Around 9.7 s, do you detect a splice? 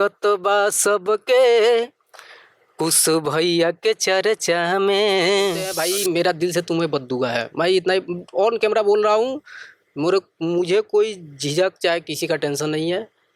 no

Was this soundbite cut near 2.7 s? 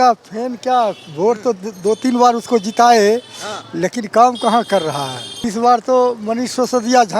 no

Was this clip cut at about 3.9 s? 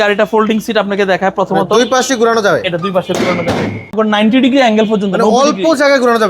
yes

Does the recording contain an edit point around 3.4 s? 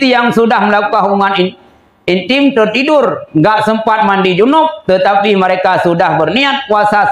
no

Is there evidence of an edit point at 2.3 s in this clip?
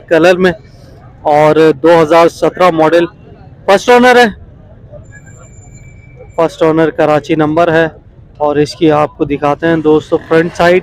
no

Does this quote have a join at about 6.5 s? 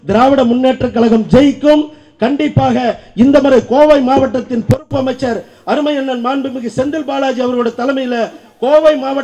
no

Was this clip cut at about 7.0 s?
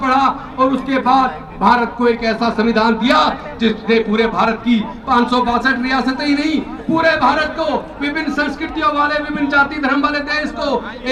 no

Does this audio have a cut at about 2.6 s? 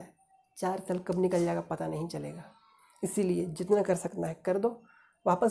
no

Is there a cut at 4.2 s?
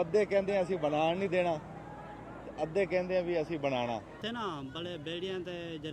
yes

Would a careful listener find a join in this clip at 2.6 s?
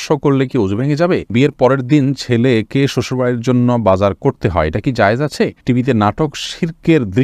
no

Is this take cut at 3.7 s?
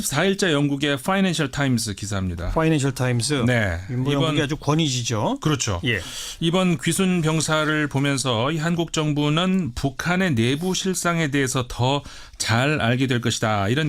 yes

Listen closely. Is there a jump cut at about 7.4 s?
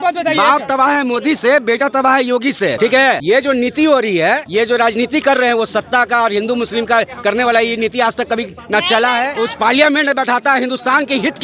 no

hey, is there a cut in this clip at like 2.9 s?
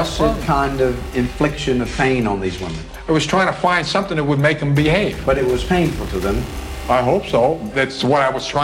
no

